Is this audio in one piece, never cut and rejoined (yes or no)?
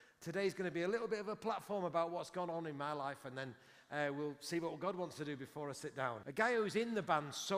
no